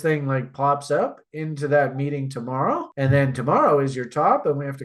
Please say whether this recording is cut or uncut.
uncut